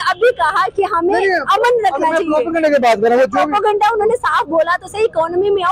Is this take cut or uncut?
uncut